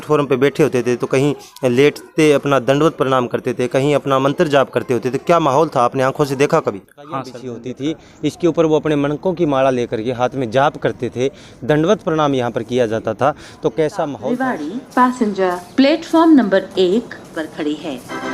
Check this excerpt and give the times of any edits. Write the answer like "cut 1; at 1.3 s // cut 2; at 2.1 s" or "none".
cut 1; at 7.6 s // cut 2; at 14.2 s